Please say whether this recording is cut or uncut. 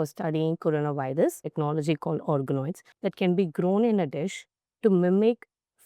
cut